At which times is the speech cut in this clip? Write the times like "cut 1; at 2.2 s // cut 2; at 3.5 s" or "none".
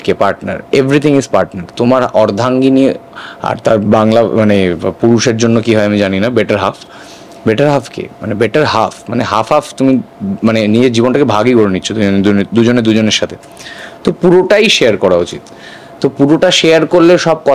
none